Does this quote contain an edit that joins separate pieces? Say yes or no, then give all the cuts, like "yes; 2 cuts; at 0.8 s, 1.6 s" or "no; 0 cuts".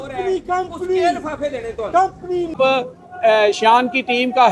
yes; 1 cut; at 2.6 s